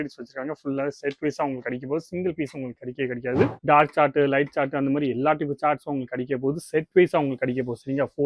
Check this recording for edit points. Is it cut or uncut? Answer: cut